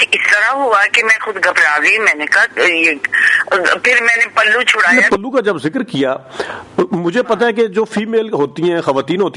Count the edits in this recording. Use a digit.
1